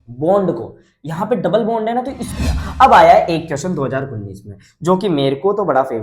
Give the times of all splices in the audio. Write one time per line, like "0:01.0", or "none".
0:02.3